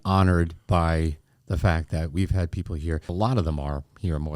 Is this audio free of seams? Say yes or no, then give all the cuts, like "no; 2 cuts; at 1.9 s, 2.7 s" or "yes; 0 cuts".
no; 1 cut; at 3.0 s